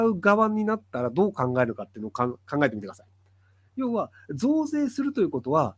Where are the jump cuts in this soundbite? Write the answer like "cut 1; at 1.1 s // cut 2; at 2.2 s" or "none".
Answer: none